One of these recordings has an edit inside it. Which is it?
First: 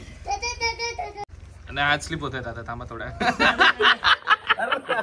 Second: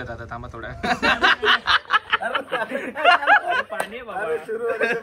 first; 1 cut; at 1.2 s

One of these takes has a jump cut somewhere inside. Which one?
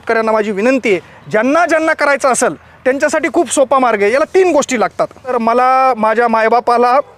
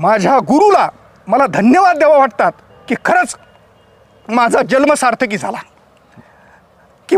first; 1 cut; at 5.3 s

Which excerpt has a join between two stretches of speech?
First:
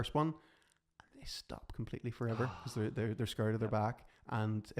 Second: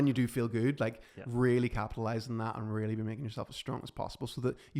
first; 1 cut; at 2.6 s

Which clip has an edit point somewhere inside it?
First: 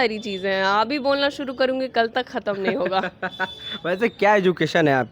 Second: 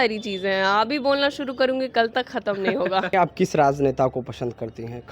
second; 1 cut; at 3.1 s

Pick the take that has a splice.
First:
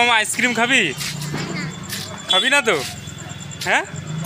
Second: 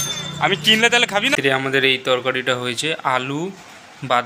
second; 1 cut; at 1.3 s

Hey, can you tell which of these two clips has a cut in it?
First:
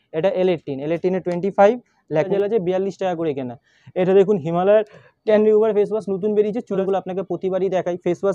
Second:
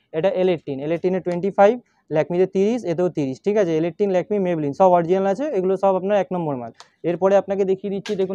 first; 2 cuts; at 2.3 s, 6.8 s

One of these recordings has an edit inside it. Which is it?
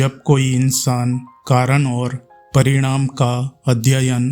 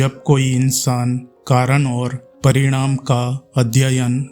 second; 1 cut; at 2.2 s

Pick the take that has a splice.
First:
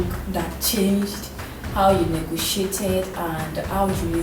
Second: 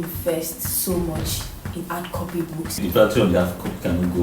second; 1 cut; at 2.8 s

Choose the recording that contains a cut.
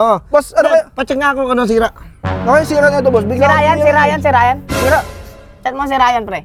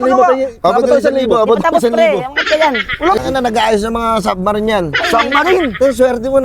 second; 1 cut; at 3.2 s

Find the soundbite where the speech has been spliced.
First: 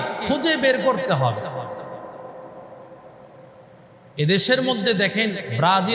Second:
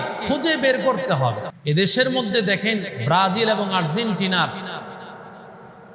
second; 1 cut; at 1.5 s

